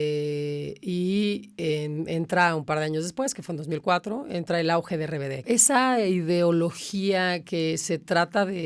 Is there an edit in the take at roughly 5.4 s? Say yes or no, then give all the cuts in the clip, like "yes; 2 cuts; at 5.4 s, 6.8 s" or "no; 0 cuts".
yes; 1 cut; at 5.4 s